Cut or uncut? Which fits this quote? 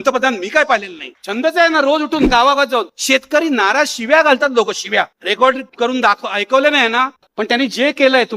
cut